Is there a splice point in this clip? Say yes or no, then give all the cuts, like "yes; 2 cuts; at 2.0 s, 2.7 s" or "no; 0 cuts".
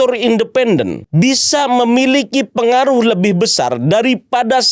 yes; 1 cut; at 1.0 s